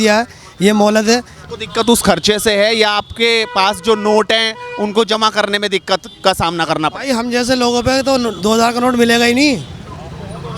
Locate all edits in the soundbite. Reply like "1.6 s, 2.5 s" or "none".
1.3 s